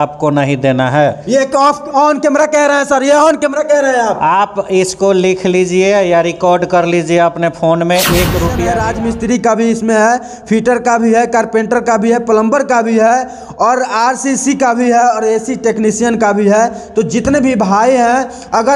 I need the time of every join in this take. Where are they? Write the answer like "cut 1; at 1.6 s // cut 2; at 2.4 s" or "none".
cut 1; at 8.6 s